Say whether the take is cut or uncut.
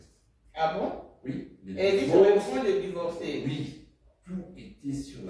uncut